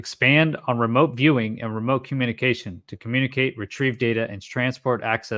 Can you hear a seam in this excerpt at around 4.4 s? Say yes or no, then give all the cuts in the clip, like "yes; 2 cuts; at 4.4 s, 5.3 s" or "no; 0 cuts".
no; 0 cuts